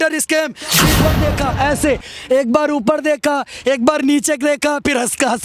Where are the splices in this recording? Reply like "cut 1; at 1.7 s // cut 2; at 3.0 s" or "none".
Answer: cut 1; at 1.1 s